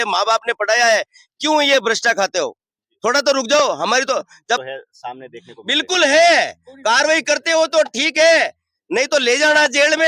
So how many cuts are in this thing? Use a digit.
1